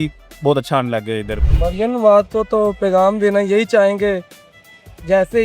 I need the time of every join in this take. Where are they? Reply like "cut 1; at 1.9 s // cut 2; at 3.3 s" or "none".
cut 1; at 1.3 s